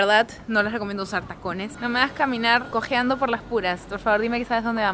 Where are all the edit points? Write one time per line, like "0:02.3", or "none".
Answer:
0:01.7
0:02.7